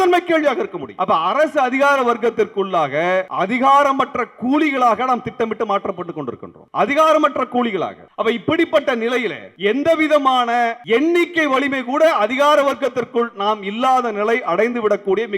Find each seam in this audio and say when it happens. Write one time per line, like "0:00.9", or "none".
0:00.9
0:03.3
0:06.5
0:08.0
0:09.4
0:10.8